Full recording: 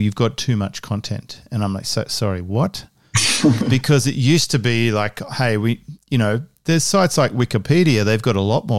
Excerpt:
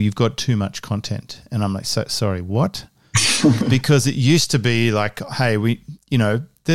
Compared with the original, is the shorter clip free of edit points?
yes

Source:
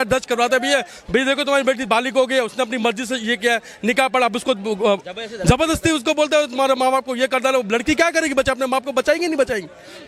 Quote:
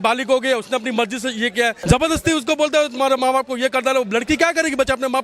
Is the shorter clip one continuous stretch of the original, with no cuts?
no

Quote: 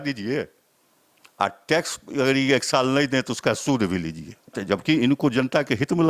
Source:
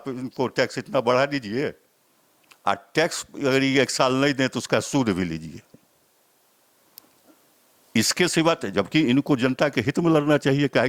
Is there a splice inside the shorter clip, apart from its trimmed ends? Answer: yes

